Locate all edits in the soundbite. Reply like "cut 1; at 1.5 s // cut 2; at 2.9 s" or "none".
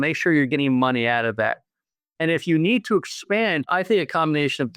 cut 1; at 3.7 s